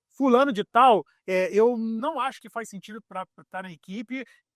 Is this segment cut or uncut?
uncut